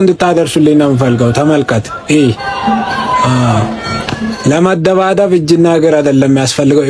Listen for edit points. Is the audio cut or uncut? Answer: uncut